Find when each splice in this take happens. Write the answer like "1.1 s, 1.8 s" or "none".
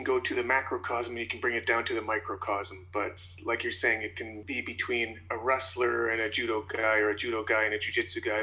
4.4 s